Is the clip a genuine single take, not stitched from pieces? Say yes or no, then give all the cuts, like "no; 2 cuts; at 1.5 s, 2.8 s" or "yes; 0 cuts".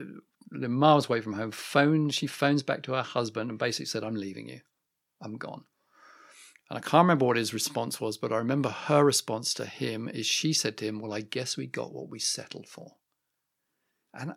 yes; 0 cuts